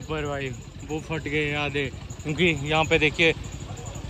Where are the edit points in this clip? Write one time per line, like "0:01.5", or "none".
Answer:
none